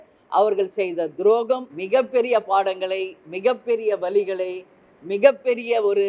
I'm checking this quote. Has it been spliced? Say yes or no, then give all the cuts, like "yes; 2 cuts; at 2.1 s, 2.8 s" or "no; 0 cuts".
yes; 1 cut; at 1.7 s